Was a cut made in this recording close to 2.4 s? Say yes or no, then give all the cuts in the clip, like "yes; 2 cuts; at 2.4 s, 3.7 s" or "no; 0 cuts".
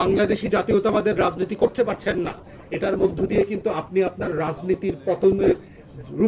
no; 0 cuts